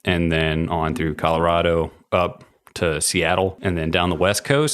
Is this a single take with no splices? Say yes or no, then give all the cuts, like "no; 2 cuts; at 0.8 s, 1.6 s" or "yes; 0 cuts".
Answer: no; 1 cut; at 3.6 s